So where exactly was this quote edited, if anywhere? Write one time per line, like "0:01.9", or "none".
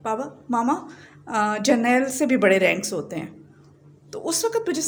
none

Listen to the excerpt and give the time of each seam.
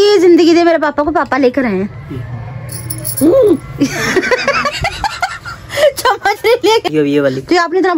0:03.7
0:06.9

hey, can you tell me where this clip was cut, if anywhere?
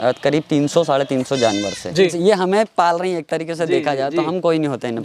0:02.1

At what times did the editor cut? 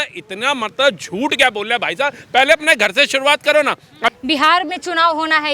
0:04.2

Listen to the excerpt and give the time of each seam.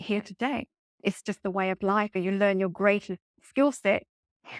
0:00.9
0:02.2
0:03.4

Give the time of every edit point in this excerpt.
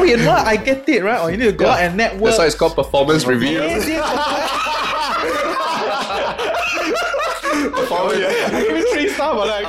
none

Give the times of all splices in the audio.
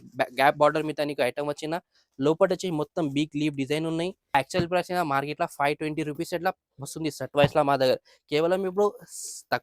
0:04.3

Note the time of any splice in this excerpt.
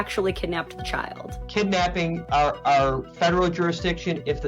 0:01.4
0:02.2

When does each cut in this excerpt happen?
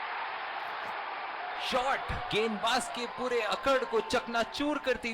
0:01.6

